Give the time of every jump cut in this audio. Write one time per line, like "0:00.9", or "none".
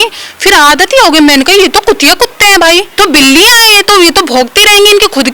0:02.9